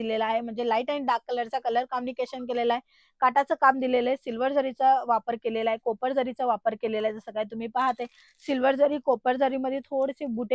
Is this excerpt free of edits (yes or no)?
yes